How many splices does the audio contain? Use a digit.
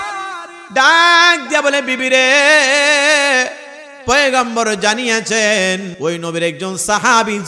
1